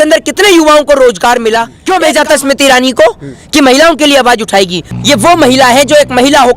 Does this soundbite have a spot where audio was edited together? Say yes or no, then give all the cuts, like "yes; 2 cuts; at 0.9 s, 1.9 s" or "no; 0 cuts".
yes; 2 cuts; at 1.7 s, 4.9 s